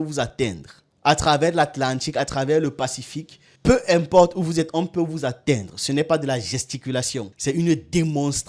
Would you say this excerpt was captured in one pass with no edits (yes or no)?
yes